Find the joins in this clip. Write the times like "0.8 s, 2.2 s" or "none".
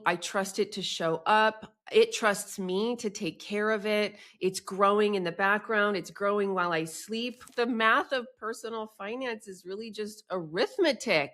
7.5 s